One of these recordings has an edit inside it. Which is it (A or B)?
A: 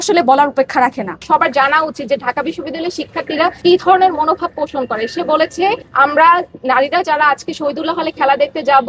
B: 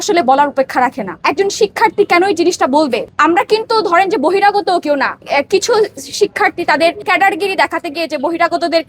A